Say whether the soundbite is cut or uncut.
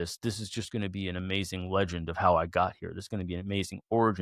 uncut